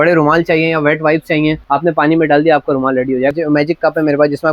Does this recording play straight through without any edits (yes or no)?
no